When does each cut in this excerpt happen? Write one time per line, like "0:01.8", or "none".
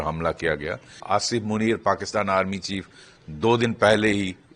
0:01.0